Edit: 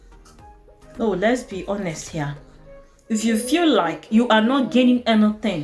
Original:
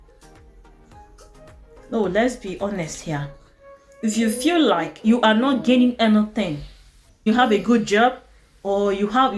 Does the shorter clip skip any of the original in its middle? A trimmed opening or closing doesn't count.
yes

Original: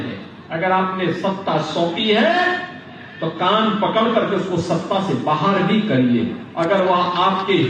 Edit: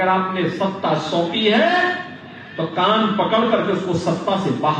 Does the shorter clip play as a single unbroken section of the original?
yes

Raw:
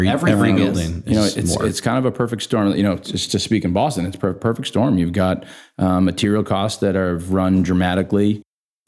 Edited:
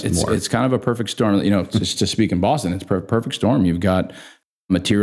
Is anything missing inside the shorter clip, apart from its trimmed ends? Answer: no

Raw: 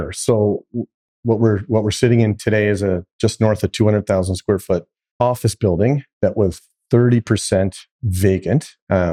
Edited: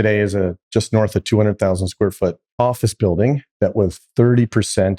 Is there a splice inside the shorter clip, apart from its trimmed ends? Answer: yes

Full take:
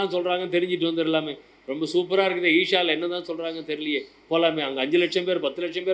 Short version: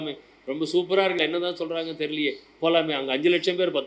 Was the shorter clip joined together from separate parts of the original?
yes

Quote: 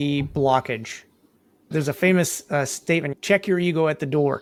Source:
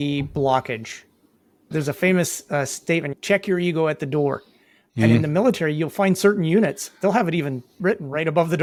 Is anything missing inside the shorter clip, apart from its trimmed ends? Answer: no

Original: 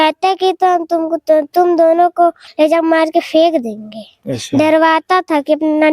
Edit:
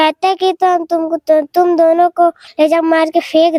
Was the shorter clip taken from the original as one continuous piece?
yes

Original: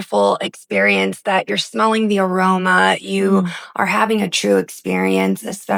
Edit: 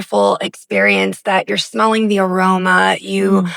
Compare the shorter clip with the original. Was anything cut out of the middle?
no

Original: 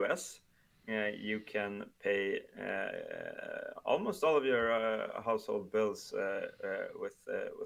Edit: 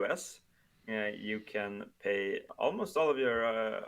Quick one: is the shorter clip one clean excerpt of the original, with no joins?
no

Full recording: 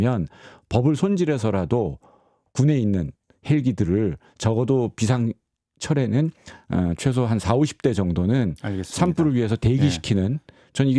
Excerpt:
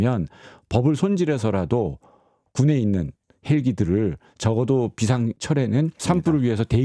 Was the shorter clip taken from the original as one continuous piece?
no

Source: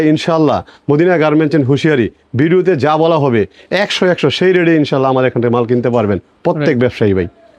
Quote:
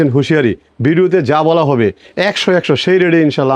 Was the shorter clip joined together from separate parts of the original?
no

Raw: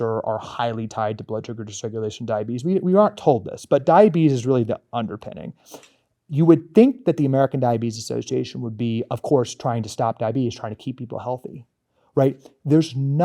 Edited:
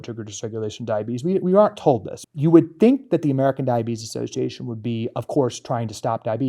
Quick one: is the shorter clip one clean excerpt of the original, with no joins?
no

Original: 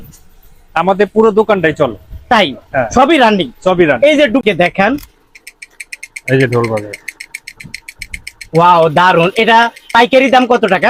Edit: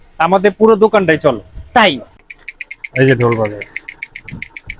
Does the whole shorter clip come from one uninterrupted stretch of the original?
no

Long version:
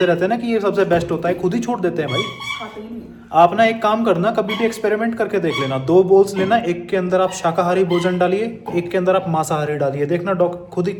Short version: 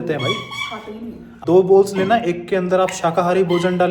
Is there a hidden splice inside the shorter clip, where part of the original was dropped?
yes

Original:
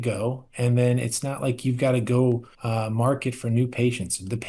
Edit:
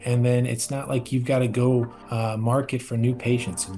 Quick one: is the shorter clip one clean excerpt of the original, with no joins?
yes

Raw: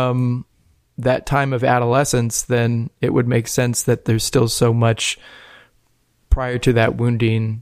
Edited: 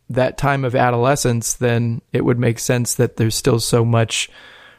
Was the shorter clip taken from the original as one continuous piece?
yes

